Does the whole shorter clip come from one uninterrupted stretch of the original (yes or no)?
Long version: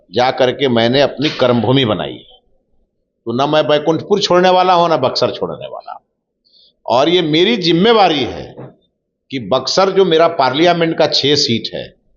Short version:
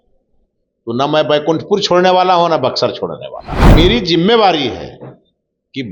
no